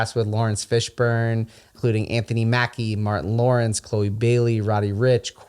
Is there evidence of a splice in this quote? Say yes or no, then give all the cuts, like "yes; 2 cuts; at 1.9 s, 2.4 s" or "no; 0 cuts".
yes; 1 cut; at 1.7 s